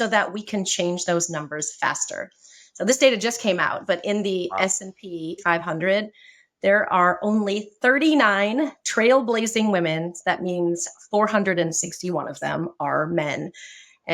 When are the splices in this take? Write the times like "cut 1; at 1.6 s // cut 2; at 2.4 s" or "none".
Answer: cut 1; at 5.4 s